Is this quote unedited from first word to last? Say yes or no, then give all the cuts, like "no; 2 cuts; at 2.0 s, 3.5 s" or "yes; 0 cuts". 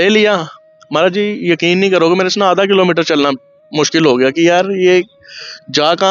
yes; 0 cuts